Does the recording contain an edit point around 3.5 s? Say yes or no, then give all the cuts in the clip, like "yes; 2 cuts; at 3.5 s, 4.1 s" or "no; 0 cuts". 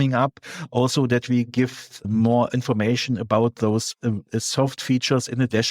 no; 1 cut; at 1.9 s